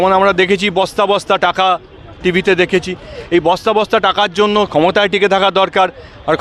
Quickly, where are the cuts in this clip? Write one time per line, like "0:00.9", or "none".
none